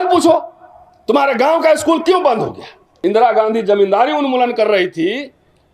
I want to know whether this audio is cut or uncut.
cut